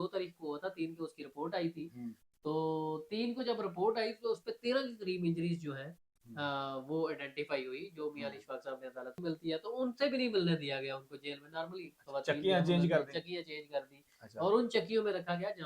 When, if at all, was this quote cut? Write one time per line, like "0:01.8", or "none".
0:09.2